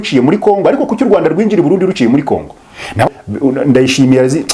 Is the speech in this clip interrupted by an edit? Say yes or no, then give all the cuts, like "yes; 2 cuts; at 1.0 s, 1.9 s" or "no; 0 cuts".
yes; 1 cut; at 3.1 s